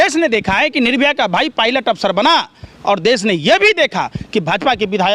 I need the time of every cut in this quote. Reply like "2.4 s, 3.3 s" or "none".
none